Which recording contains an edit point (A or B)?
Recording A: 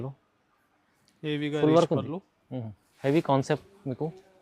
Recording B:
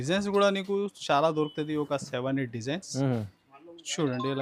A